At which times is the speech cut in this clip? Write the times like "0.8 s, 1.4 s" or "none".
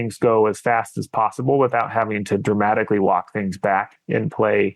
none